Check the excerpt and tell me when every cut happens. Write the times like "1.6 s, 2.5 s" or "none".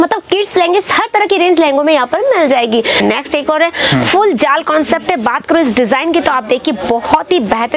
3.0 s